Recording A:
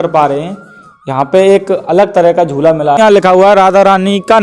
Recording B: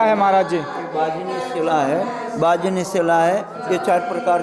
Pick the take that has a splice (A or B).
A